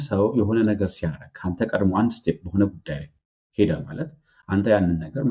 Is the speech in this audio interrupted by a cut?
no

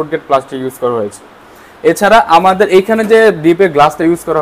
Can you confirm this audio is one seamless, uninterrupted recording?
yes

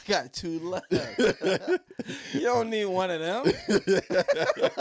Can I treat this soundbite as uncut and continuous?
yes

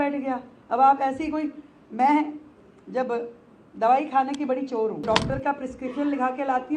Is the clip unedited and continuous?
no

